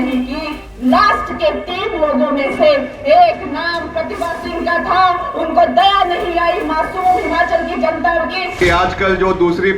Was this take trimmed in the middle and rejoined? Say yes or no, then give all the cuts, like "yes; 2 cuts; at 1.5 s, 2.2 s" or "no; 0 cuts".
yes; 1 cut; at 8.6 s